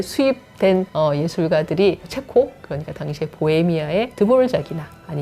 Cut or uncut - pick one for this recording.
cut